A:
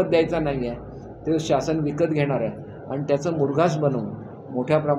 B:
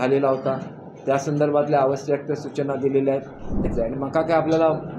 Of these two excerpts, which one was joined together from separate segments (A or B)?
B